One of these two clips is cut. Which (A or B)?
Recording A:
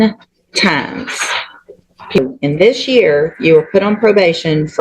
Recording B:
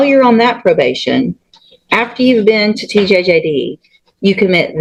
A